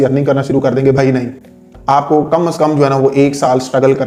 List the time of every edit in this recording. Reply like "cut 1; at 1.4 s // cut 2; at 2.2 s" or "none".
none